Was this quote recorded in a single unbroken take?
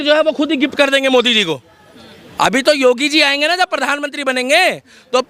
yes; 0 cuts

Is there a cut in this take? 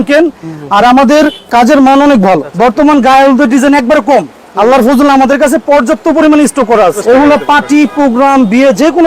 yes; 2 cuts; at 2.5 s, 7.0 s

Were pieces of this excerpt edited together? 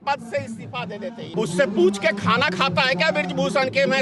yes; 1 cut; at 1.3 s

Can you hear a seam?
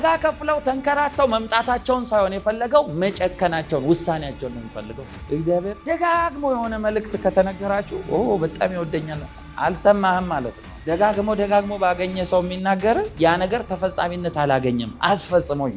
yes; 1 cut; at 5.2 s

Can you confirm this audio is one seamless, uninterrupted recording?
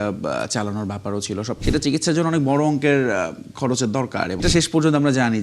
no; 2 cuts; at 1.5 s, 4.4 s

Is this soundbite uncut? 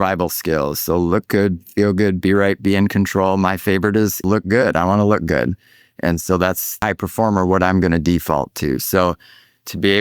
no; 2 cuts; at 4.2 s, 6.8 s

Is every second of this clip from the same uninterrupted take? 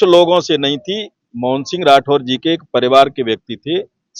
yes; 0 cuts

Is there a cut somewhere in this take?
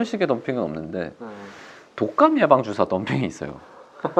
no; 0 cuts

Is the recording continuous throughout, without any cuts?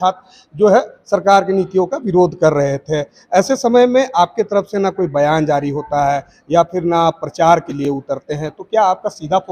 yes; 0 cuts

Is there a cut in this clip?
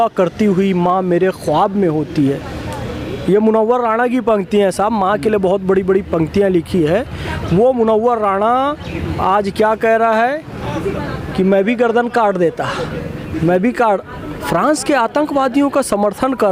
no; 0 cuts

